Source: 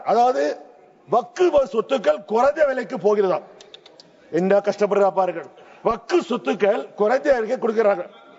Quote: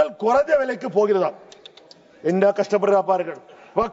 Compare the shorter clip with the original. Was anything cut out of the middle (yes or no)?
no